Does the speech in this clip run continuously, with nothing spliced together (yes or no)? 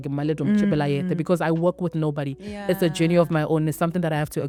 yes